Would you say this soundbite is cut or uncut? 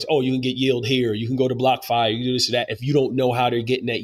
uncut